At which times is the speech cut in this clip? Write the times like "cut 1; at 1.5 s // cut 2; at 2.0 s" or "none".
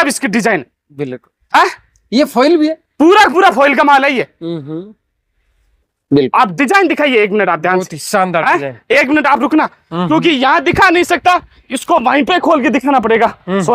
none